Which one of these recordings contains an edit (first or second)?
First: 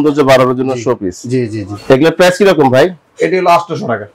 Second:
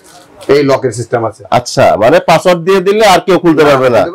first